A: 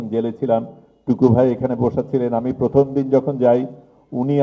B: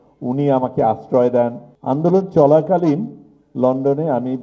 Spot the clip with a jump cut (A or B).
B